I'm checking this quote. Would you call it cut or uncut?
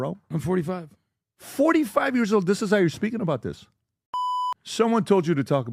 cut